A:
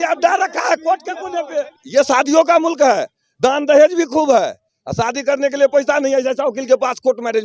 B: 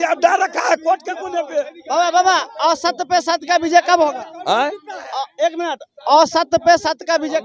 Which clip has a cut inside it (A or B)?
A